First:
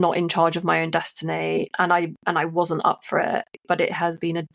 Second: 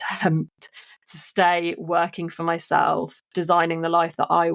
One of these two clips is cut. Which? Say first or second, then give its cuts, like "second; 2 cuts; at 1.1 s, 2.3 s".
first; 1 cut; at 3.5 s